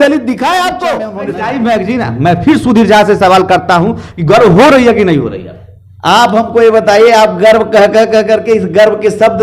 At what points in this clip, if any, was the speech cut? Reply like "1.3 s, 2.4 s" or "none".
1.1 s

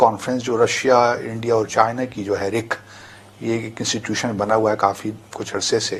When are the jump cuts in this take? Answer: none

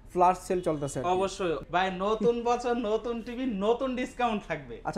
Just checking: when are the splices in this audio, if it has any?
1.6 s

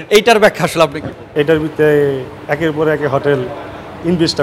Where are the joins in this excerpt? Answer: 1.2 s

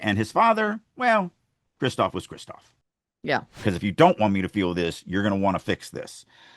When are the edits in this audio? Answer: 3.5 s

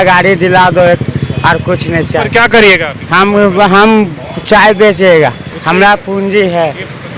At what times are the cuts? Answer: none

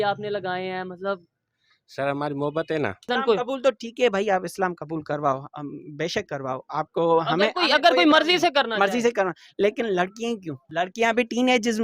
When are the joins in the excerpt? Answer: 3.1 s, 10.7 s

